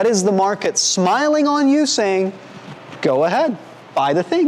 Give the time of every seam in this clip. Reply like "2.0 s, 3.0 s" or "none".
none